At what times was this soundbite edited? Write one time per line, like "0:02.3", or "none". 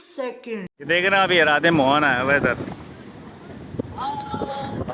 none